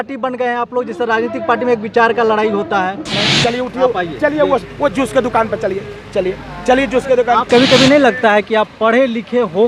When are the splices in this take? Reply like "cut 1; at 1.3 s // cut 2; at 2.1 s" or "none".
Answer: cut 1; at 3.1 s // cut 2; at 7.5 s